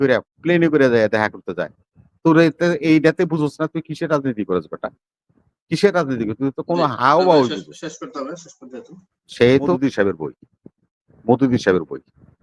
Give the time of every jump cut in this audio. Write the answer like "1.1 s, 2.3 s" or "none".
9.8 s

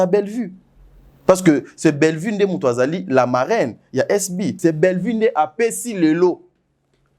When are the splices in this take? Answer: 4.6 s

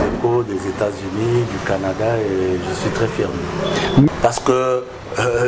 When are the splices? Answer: 4.1 s

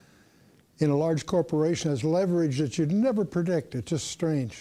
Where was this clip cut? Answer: none

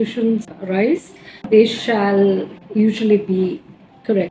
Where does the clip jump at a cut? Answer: 2.6 s

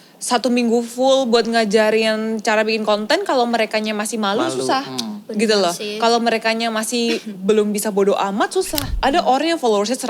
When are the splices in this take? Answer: 8.8 s

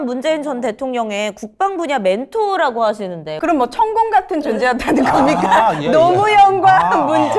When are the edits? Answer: 3.3 s

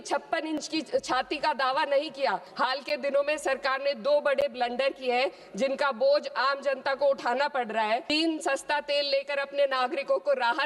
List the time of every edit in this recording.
2.5 s, 8.0 s

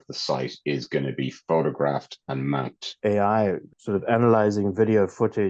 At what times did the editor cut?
2.8 s, 3.7 s

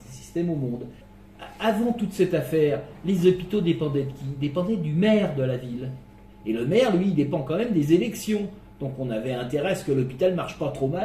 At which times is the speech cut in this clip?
1.0 s

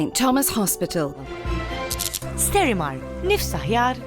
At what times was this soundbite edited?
2.1 s

